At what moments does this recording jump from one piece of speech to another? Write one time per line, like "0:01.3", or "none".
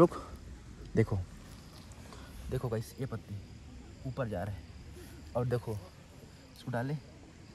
none